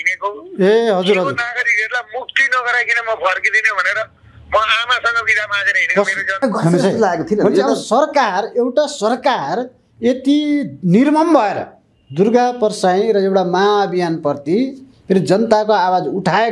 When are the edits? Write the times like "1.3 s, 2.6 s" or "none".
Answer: 6.4 s